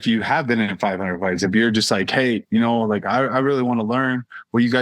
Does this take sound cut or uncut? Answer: uncut